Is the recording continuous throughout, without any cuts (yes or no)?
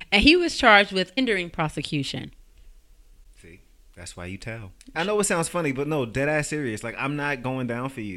no